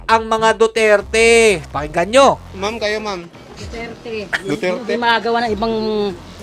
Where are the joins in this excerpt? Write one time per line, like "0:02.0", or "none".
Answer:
0:01.8